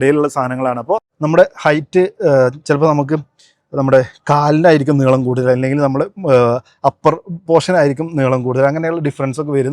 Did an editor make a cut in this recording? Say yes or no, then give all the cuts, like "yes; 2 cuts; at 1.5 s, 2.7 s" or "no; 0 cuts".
yes; 1 cut; at 1.1 s